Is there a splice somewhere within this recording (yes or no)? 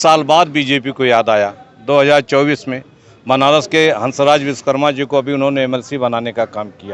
no